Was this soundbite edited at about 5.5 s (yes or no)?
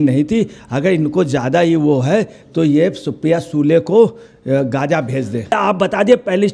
yes